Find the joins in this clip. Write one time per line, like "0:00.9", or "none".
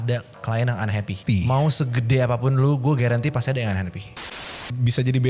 0:01.2
0:04.1